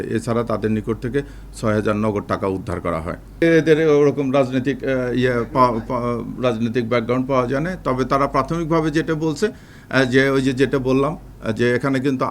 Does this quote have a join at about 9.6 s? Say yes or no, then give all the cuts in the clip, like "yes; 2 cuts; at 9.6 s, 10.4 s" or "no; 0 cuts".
no; 1 cut; at 3.2 s